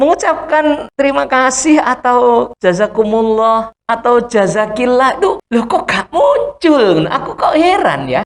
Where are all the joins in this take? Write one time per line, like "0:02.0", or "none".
0:00.9
0:02.5
0:03.7
0:05.4